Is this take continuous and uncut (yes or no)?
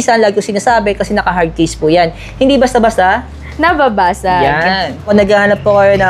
no